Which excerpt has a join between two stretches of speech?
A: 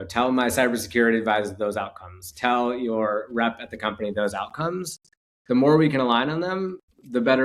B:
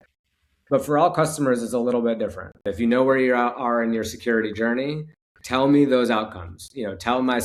B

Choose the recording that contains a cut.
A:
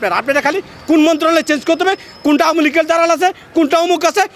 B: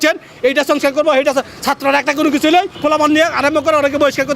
B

